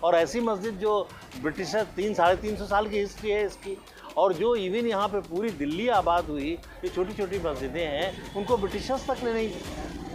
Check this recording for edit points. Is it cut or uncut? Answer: uncut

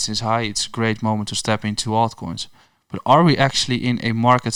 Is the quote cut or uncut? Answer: uncut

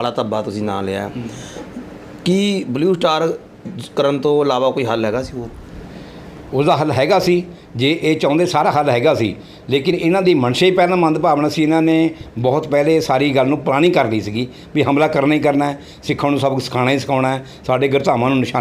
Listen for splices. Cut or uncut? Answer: uncut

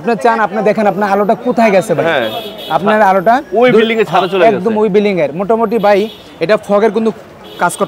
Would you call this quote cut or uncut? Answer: uncut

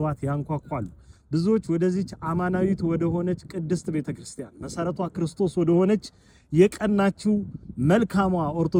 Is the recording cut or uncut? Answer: uncut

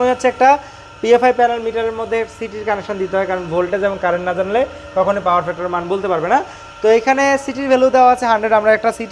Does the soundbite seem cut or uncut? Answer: uncut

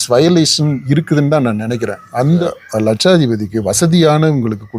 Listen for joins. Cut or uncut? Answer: cut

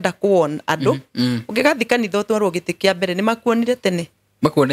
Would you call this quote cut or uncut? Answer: uncut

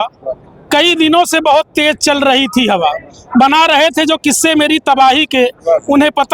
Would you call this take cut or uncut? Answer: uncut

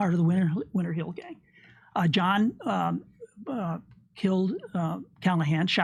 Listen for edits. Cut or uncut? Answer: uncut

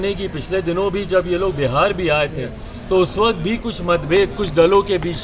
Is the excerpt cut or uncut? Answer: uncut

